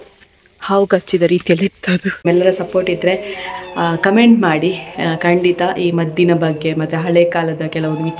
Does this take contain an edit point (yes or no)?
yes